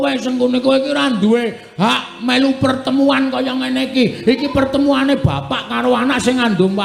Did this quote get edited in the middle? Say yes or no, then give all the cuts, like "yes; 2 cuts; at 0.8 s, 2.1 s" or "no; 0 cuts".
no; 0 cuts